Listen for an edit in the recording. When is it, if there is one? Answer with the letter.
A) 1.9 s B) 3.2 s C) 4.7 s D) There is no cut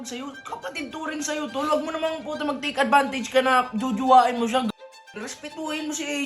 C